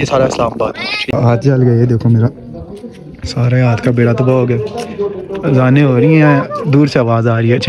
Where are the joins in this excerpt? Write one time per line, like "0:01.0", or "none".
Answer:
0:01.0